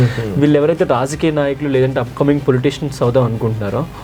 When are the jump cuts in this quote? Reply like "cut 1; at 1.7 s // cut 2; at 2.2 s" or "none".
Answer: none